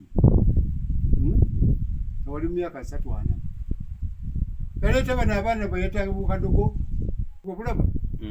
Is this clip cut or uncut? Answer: cut